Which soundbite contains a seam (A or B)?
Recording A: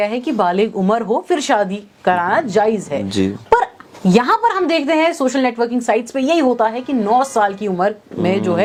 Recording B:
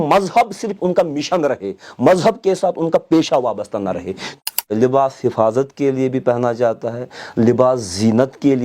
B